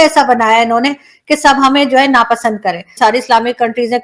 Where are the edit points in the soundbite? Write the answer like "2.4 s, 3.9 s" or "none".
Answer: none